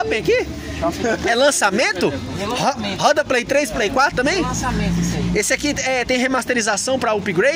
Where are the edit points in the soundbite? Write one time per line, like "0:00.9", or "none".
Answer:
none